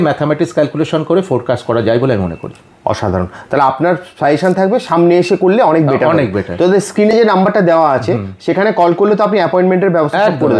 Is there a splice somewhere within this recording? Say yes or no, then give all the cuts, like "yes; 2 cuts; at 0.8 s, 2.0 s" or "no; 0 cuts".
no; 0 cuts